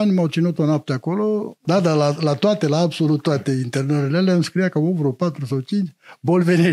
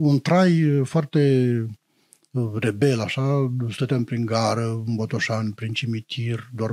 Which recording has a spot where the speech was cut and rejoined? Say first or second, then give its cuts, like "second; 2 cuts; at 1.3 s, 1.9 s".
first; 1 cut; at 1.6 s